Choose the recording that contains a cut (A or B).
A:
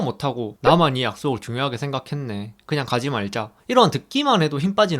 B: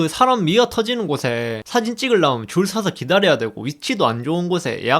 B